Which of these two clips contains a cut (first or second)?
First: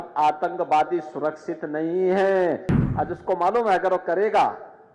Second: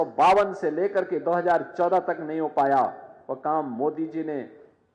first